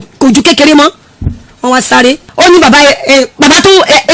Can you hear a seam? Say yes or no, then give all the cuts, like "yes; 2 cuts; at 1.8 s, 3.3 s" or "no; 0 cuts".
yes; 1 cut; at 2.3 s